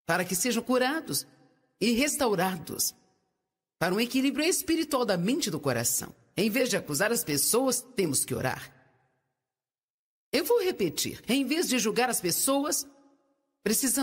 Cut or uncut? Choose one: uncut